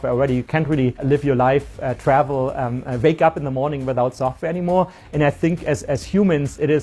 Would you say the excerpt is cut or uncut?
cut